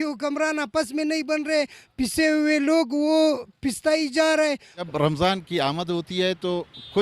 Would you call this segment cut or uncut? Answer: cut